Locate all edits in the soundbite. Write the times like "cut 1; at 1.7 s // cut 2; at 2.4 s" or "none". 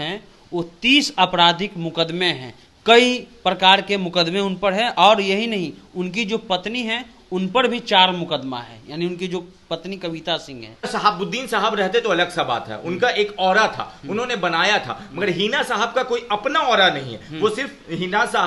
cut 1; at 10.9 s

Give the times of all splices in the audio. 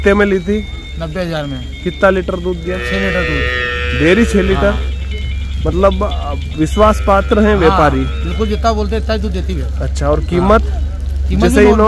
none

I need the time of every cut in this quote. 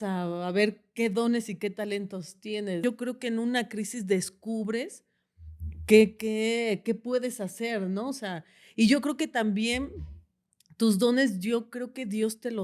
cut 1; at 2.8 s

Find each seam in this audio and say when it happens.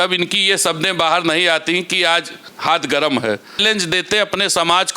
cut 1; at 3.6 s

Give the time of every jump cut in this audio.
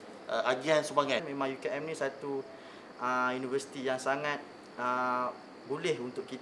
cut 1; at 1.3 s

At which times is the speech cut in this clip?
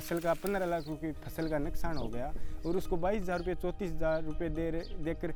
none

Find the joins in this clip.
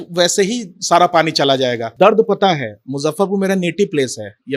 cut 1; at 1.9 s

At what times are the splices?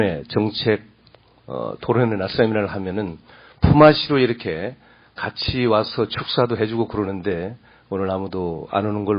none

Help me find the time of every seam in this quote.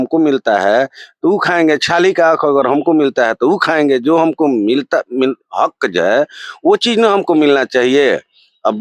none

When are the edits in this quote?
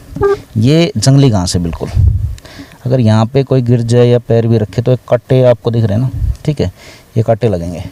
none

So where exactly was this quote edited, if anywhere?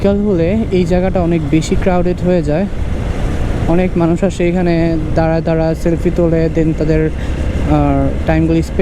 none

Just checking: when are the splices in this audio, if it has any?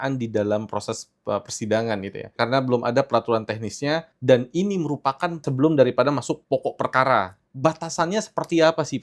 cut 1; at 2.3 s // cut 2; at 4.1 s // cut 3; at 5.5 s // cut 4; at 6.4 s // cut 5; at 7.4 s

